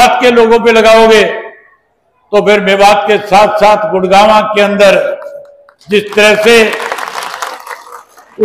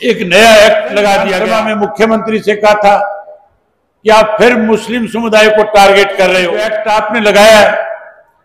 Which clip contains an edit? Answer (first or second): second